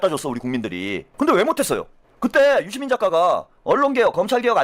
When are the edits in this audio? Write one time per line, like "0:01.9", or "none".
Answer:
0:01.0
0:03.5